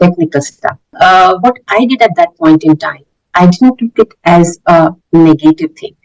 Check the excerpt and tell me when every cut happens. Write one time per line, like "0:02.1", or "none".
0:00.9